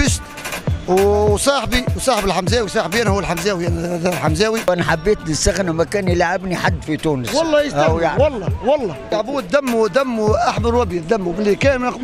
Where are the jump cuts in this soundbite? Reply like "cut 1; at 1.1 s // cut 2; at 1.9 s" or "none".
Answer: cut 1; at 4.7 s // cut 2; at 9.1 s

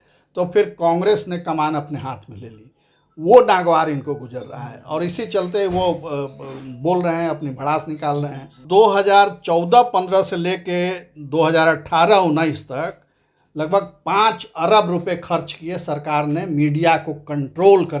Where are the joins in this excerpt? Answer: cut 1; at 8.6 s

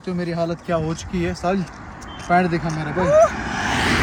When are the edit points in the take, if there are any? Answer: none

